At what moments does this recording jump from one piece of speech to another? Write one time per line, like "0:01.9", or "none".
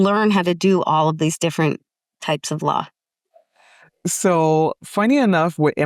none